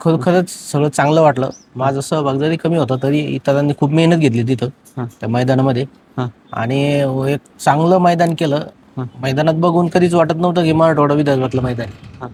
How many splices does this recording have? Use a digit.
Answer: 0